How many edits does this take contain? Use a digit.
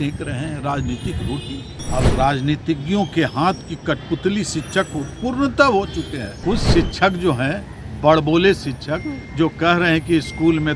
2